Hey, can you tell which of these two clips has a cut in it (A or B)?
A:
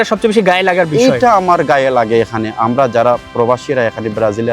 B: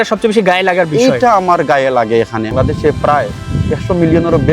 B